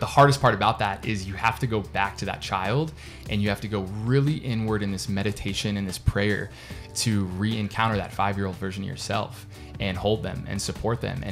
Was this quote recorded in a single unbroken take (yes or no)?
yes